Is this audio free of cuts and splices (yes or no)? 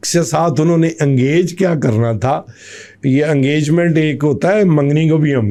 yes